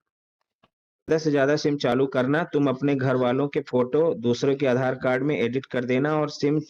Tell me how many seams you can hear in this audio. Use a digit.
1